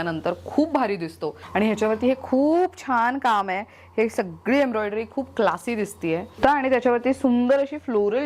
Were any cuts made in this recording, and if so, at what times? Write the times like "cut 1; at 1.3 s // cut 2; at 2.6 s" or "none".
cut 1; at 1.3 s // cut 2; at 6.4 s